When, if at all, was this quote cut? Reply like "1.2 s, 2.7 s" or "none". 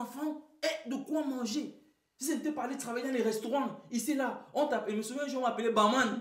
none